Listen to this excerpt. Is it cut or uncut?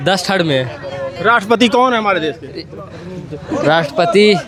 uncut